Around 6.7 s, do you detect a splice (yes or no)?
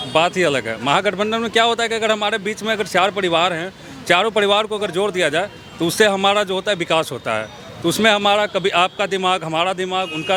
no